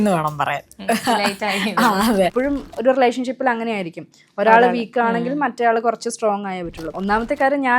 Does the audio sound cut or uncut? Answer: cut